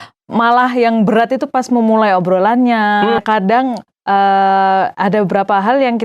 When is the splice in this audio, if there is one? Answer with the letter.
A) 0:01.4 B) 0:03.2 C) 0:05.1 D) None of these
B